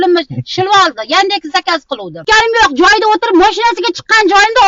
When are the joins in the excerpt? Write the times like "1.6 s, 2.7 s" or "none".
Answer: 2.2 s